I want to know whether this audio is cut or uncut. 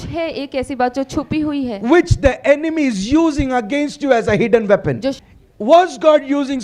cut